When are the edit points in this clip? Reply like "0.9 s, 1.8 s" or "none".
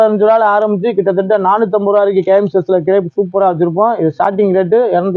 none

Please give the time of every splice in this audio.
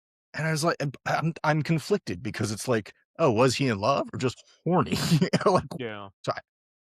5.7 s

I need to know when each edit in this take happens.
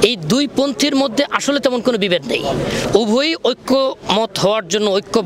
none

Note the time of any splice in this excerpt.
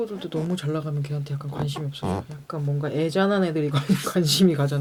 none

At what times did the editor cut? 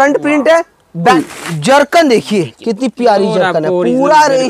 1.1 s

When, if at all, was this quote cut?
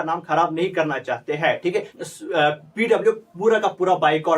1.9 s

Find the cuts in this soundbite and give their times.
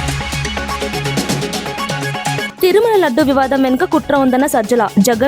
2.5 s

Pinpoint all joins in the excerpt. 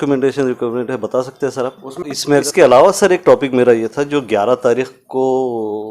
1.9 s

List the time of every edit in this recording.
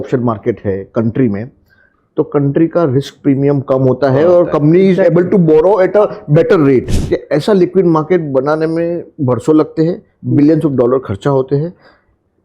6.9 s

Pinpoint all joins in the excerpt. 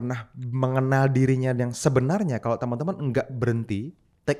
none

